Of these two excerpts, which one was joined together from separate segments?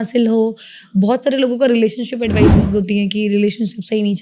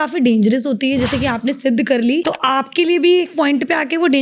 second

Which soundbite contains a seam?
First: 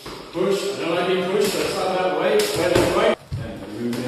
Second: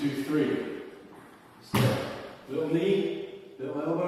first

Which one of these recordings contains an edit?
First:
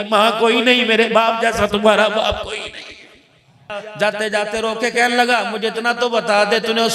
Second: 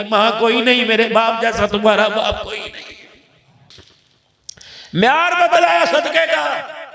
first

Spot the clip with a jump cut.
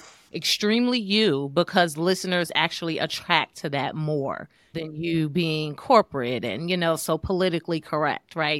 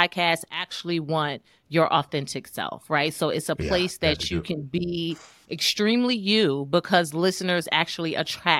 first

